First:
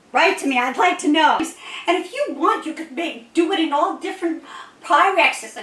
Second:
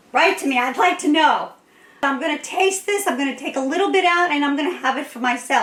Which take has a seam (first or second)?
first